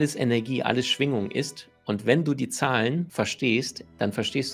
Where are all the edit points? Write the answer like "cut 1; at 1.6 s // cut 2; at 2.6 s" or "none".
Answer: cut 1; at 3.1 s